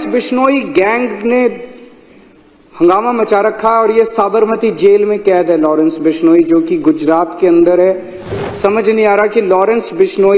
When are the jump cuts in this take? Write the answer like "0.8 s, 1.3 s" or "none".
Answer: 8.3 s